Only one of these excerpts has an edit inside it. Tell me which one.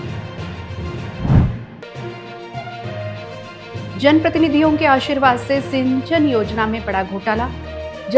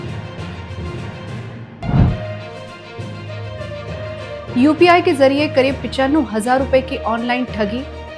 second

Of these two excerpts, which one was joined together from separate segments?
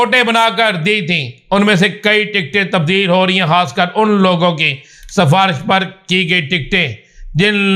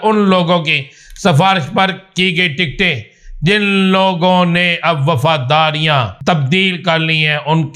second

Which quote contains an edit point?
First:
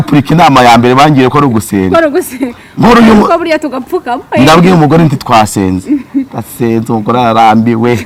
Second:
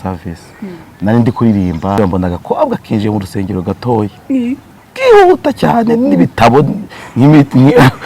second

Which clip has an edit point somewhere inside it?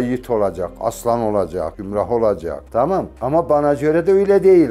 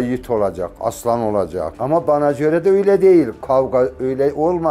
second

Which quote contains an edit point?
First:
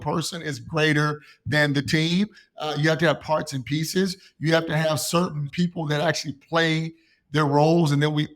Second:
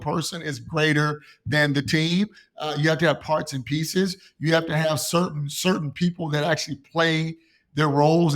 first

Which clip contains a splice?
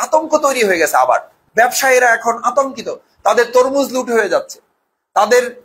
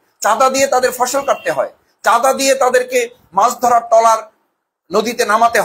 first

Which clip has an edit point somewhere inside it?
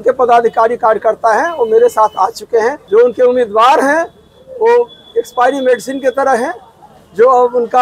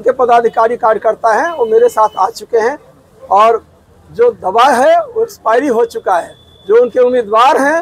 first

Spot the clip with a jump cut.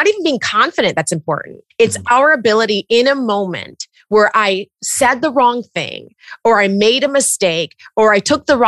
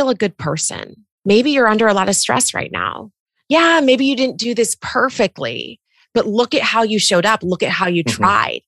first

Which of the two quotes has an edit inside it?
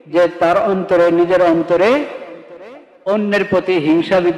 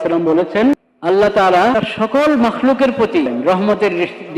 second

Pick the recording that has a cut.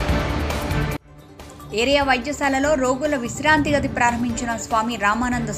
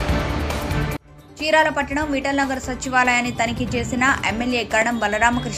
second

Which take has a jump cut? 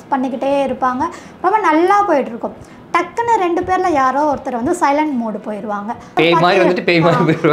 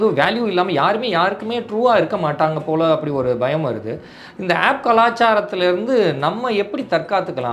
first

